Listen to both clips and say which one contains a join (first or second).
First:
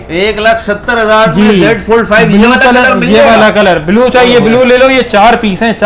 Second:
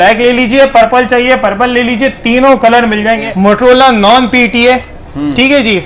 second